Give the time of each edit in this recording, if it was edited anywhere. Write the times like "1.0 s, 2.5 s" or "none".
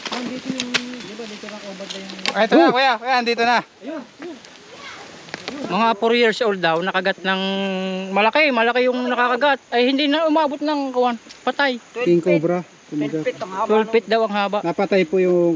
5.7 s